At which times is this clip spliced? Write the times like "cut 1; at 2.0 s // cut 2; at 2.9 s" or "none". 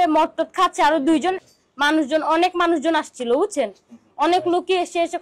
cut 1; at 1.5 s